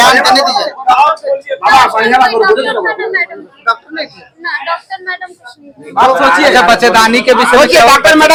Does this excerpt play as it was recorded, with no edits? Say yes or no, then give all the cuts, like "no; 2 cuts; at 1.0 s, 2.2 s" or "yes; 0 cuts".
yes; 0 cuts